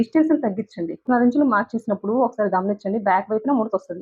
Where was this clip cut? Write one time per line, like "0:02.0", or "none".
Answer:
0:01.0